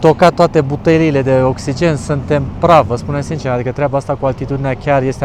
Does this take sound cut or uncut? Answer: uncut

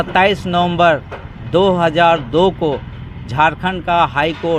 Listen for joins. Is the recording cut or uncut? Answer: uncut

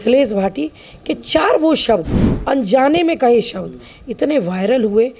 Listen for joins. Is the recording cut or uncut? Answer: uncut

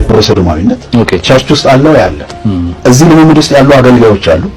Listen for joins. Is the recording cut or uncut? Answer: cut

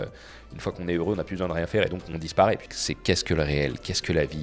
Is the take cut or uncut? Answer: cut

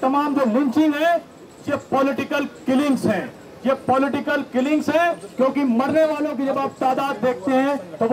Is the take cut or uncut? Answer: uncut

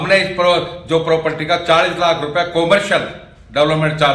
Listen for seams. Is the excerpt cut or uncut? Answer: uncut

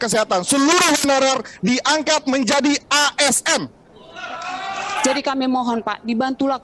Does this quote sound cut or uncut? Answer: cut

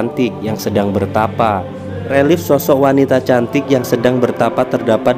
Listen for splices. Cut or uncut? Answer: cut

